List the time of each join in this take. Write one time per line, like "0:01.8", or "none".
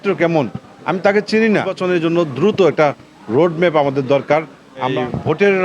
0:01.7
0:04.9

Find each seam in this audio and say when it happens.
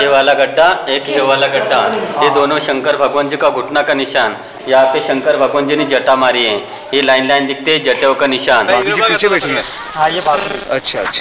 0:04.5
0:08.7

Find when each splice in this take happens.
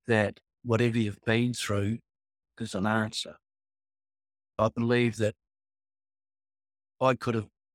0:04.6

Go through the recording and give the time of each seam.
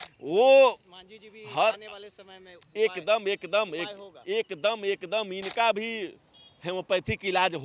none

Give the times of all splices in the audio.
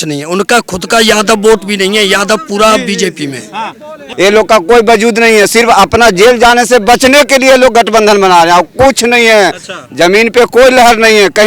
0:04.0

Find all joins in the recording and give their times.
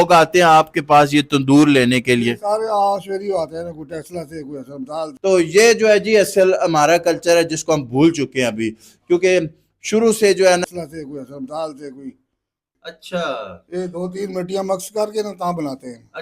0:05.2
0:10.6
0:12.5

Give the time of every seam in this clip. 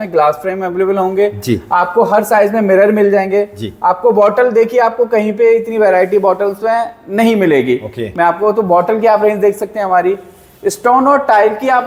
none

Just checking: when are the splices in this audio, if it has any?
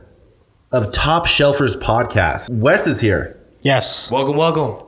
0:02.4

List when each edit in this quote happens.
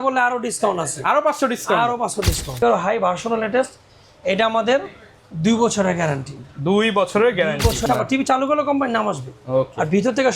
0:02.6
0:07.9

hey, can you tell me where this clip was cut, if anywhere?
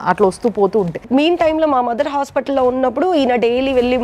0:01.0

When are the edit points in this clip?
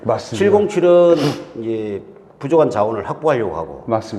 none

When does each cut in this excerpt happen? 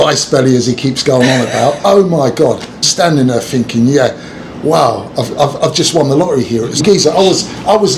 0:01.8
0:02.9
0:06.7

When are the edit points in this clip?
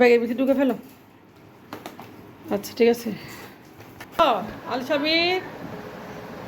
0:04.2

